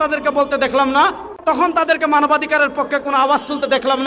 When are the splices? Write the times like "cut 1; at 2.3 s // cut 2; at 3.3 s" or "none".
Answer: cut 1; at 1.4 s